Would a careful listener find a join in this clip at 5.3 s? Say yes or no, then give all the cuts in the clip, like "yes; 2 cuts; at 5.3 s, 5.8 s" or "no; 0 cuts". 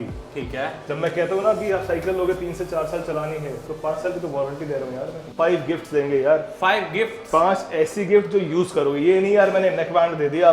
yes; 1 cut; at 5.3 s